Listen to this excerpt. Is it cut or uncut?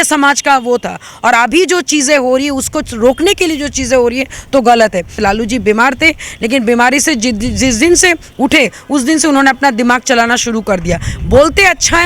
cut